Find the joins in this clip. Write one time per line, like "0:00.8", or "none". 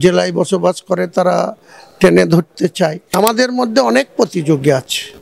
0:03.2